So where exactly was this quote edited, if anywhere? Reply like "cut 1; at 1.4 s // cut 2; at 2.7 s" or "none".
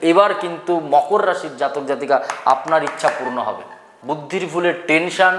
cut 1; at 3.9 s